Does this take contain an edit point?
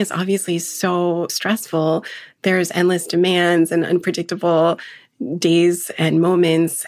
yes; 1 cut; at 1.3 s

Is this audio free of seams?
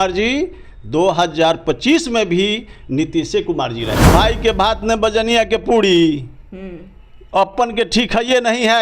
no; 1 cut; at 4.0 s

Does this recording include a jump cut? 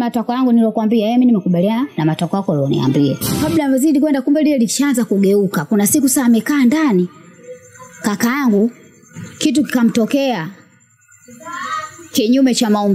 yes; 1 cut; at 3.4 s

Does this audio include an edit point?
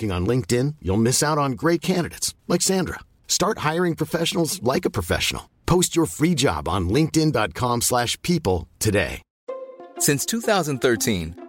no; 0 cuts

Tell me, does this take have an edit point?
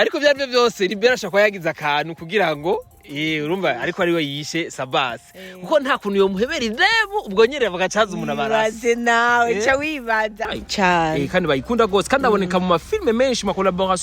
yes; 1 cut; at 10.4 s

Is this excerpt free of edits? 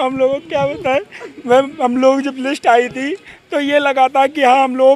yes; 0 cuts

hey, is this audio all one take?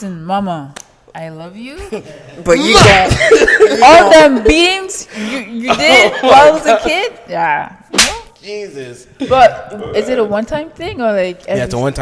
yes; 0 cuts

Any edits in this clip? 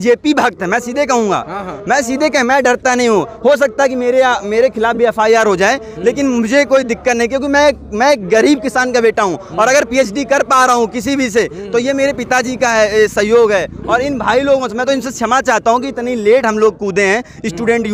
no; 0 cuts

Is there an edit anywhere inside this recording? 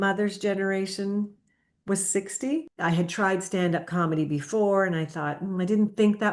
yes; 1 cut; at 2.7 s

